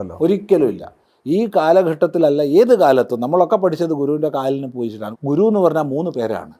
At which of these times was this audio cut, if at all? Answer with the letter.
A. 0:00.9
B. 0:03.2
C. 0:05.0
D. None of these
C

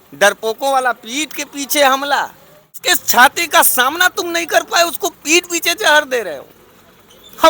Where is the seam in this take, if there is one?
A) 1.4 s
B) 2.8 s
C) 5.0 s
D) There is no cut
B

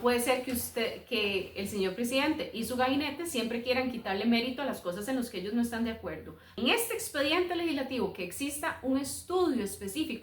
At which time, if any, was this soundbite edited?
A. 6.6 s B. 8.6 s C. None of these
A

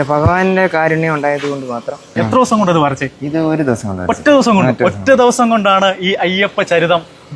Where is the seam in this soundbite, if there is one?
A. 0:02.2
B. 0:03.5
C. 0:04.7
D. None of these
A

